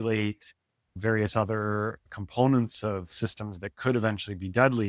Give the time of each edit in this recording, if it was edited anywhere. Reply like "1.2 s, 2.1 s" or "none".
1.0 s, 2.2 s